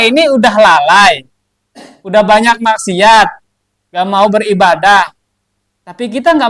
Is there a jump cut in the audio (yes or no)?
no